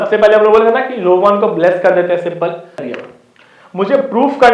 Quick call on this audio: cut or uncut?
cut